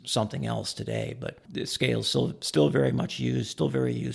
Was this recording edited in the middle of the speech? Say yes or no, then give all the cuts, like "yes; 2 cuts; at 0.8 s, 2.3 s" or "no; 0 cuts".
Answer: yes; 1 cut; at 1.4 s